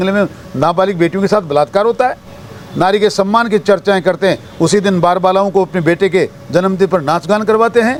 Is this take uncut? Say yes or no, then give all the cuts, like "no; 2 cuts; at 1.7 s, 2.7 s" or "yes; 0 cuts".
yes; 0 cuts